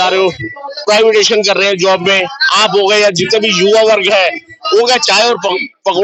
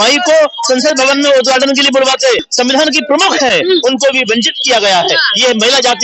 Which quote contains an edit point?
second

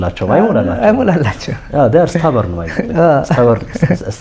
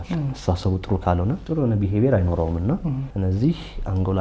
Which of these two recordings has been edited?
second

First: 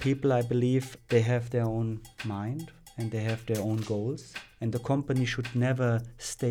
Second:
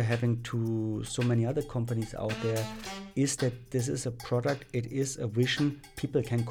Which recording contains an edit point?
first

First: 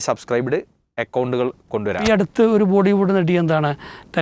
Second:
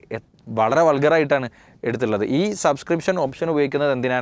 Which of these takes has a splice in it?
first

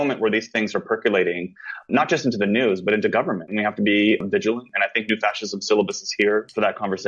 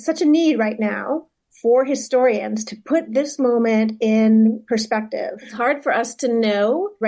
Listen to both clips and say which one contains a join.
second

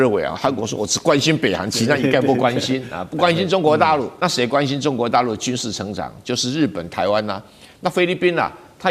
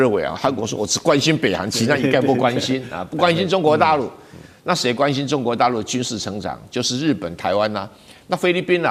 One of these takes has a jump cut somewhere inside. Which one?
first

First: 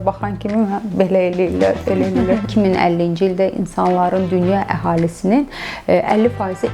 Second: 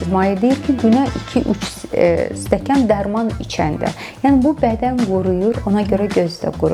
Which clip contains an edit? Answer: first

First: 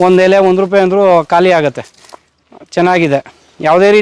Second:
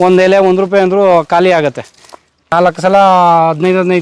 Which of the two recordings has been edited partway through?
second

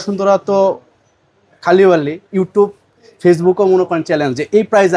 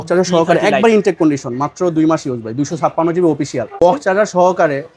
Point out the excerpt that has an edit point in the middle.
second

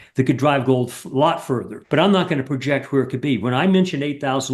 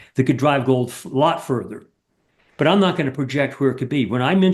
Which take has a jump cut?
first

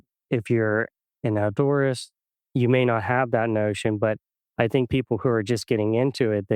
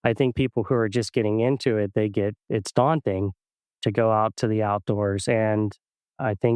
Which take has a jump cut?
first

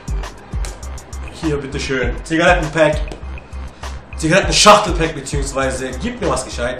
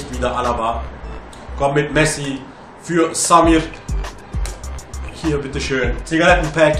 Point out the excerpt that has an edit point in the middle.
second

